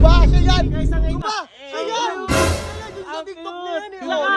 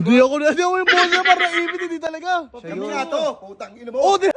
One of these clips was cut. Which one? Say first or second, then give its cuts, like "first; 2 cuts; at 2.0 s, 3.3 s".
first; 1 cut; at 1.2 s